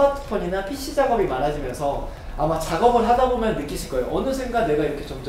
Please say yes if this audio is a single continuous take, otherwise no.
yes